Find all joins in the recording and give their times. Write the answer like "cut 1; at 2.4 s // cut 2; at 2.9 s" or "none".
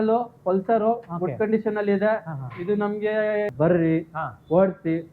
cut 1; at 3.5 s